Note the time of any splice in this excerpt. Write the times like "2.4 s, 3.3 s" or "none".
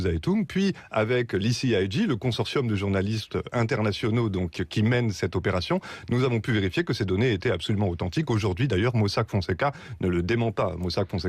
10.0 s